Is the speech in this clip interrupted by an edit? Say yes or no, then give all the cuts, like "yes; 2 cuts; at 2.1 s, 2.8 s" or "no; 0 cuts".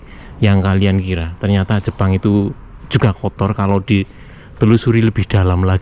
no; 0 cuts